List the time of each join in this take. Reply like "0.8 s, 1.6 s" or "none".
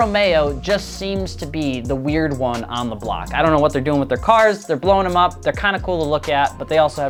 none